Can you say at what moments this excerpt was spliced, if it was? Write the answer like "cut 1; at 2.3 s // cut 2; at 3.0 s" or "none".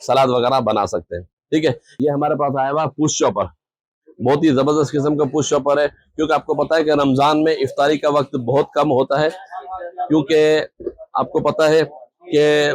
cut 1; at 1.9 s